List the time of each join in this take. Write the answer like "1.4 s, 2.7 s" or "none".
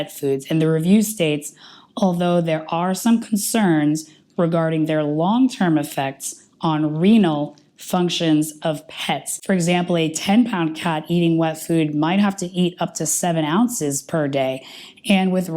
9.3 s